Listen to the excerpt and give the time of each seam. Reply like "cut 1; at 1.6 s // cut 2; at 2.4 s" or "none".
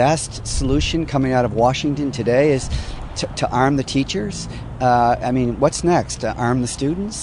none